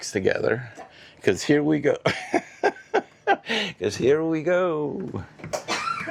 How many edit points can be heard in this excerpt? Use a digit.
0